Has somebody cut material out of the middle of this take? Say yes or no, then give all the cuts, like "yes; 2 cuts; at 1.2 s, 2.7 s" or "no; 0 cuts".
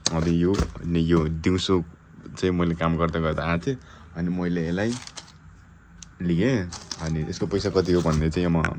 no; 0 cuts